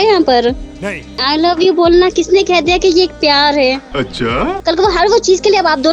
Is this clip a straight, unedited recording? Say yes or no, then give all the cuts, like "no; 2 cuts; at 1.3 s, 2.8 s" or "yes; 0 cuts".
no; 2 cuts; at 1.2 s, 4.5 s